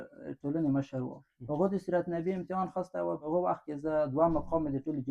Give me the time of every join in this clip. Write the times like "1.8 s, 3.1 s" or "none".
3.2 s